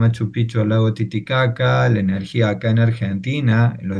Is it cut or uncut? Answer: uncut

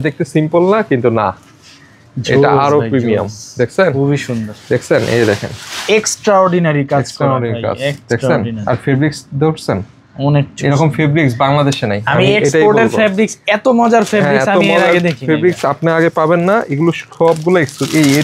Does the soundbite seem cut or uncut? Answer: uncut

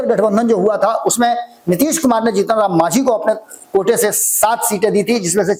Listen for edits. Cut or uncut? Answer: uncut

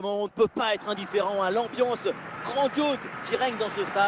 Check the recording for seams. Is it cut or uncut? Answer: uncut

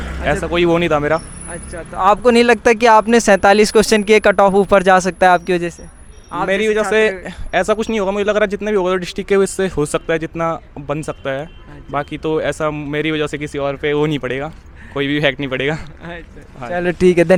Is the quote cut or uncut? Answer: uncut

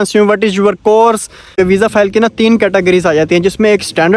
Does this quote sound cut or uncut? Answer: cut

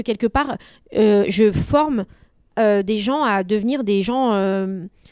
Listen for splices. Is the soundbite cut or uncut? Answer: uncut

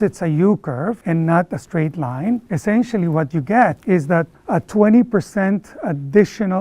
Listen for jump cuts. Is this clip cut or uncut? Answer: cut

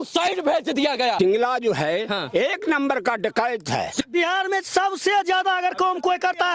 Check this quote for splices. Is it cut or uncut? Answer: cut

